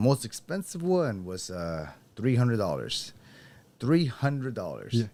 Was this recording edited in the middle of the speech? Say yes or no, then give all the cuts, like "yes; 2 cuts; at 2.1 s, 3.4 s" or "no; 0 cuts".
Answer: no; 0 cuts